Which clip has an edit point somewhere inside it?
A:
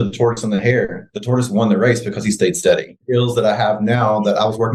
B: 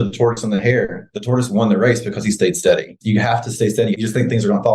B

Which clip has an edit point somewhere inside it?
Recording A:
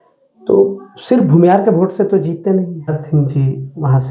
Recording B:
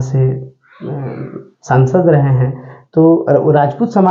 A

